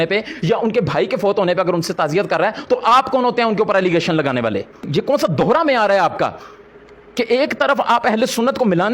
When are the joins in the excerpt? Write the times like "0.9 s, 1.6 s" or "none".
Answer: 4.7 s